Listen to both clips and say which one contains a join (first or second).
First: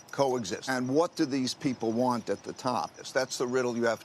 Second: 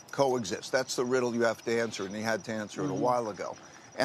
first